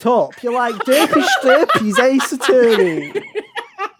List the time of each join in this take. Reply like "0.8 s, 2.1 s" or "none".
none

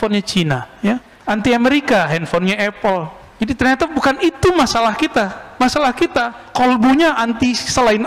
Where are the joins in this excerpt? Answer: 1.1 s, 3.2 s, 6.4 s

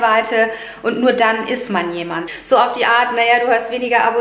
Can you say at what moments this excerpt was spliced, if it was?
2.3 s

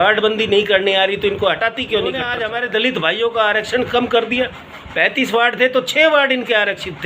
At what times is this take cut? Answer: 2.3 s

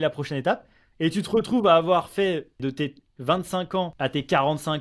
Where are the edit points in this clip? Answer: 2.6 s, 3.9 s

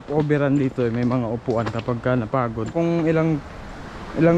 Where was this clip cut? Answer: 2.7 s

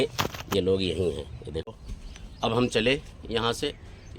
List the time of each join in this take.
1.6 s

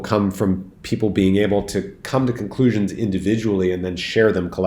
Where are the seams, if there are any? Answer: none

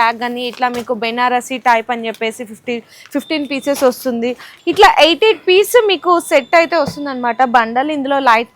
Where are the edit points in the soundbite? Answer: 4.5 s

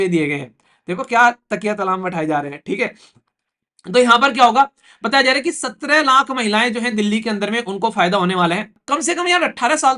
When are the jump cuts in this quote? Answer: 8.8 s

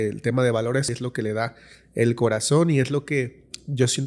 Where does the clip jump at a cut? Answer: 0.9 s

